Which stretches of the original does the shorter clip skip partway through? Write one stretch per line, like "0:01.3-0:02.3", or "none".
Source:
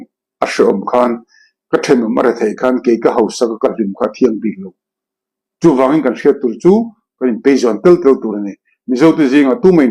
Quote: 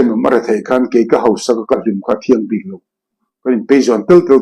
0:05.2-0:07.0